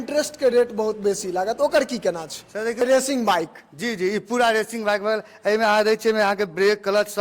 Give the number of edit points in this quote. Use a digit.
1